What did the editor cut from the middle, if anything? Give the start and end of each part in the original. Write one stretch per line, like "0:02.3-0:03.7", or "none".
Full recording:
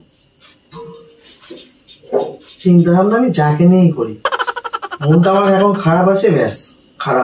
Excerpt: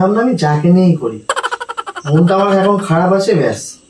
none